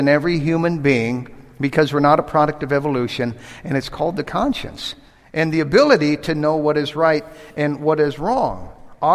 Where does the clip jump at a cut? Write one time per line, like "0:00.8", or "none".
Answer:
none